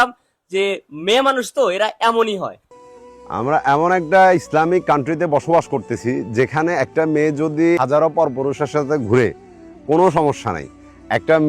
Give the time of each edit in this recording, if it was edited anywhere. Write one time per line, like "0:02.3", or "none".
0:02.6